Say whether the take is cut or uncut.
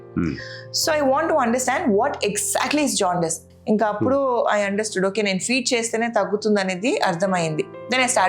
cut